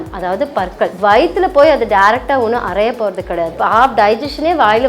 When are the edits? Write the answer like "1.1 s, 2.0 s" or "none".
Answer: 0.9 s, 3.6 s